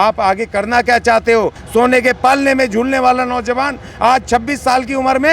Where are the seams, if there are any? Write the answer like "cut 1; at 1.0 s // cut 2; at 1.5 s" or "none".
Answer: cut 1; at 1.6 s